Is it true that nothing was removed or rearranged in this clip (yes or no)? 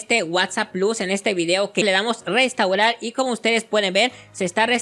no